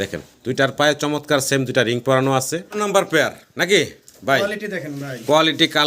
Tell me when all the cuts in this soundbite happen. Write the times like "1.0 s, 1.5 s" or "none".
2.6 s